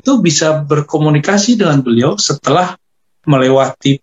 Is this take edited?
no; 0 cuts

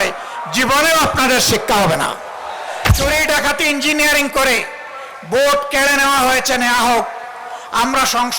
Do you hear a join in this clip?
yes; 1 cut; at 2.9 s

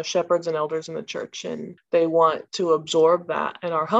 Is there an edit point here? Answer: yes; 2 cuts; at 1.7 s, 2.5 s

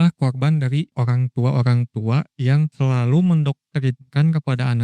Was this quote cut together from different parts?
yes; 2 cuts; at 0.9 s, 2.7 s

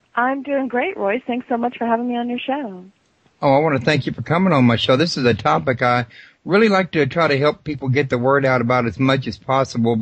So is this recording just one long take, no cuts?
yes; 0 cuts

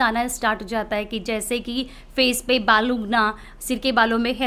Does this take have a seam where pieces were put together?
no; 0 cuts

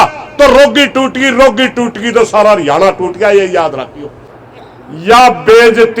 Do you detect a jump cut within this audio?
yes; 1 cut; at 4.3 s

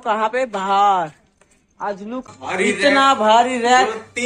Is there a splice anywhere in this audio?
yes; 1 cut; at 2.3 s

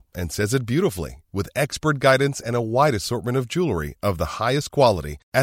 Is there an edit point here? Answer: no; 0 cuts

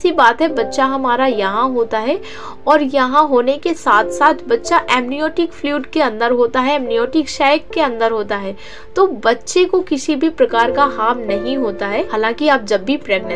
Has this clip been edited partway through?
no; 0 cuts

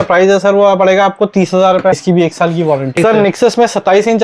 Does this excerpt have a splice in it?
yes; 2 cuts; at 2.0 s, 2.9 s

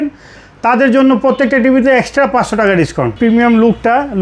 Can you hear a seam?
yes; 1 cut; at 3.2 s

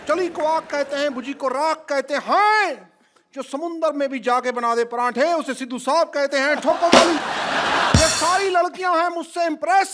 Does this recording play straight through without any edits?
no; 1 cut; at 8.0 s

